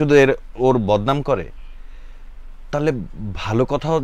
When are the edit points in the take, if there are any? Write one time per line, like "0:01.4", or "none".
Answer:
none